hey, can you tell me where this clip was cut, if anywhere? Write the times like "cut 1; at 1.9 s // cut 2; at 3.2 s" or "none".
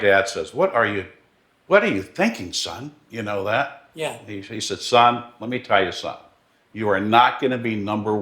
cut 1; at 4.2 s